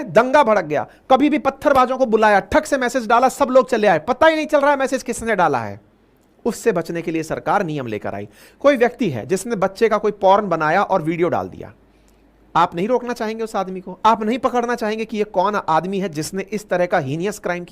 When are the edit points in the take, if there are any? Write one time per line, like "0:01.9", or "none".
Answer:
0:08.5